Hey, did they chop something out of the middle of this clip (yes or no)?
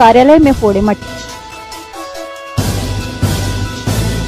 no